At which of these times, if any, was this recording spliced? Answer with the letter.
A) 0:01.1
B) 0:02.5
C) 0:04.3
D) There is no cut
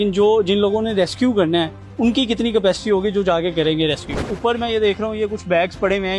C